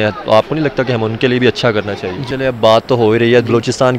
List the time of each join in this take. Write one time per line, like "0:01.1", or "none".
0:02.3